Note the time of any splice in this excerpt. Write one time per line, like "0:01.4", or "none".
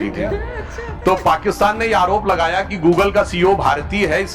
none